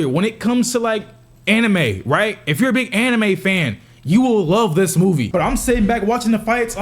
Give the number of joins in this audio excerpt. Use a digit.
1